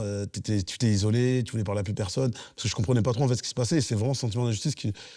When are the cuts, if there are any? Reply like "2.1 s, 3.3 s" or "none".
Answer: none